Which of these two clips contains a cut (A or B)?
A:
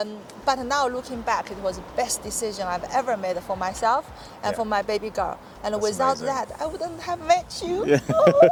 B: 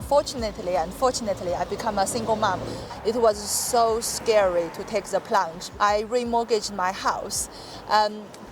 B